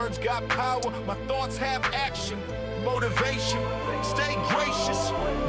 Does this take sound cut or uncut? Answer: uncut